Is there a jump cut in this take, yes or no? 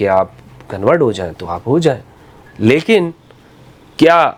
no